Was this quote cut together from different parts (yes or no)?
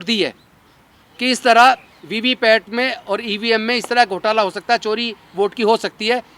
no